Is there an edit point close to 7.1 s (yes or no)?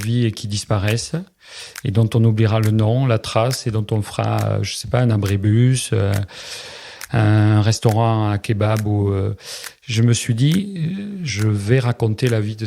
no